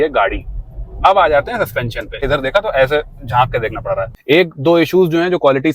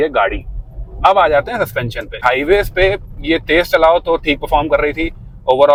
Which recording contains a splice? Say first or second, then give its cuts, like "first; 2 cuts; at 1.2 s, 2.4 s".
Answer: first; 2 cuts; at 2.2 s, 4.1 s